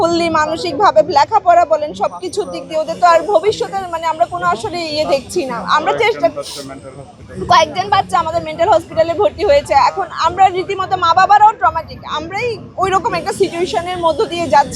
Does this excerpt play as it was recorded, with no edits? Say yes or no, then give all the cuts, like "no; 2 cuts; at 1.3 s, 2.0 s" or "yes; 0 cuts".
yes; 0 cuts